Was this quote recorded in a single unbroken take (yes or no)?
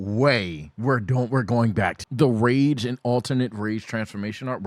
no